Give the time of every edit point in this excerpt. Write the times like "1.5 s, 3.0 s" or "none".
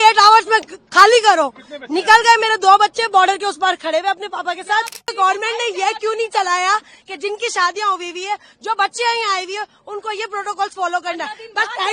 5.1 s